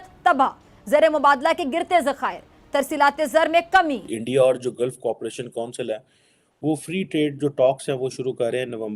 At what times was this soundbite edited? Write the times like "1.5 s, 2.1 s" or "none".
4.1 s